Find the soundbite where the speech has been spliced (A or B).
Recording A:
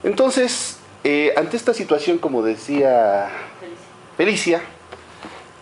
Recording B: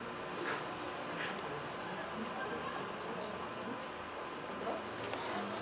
B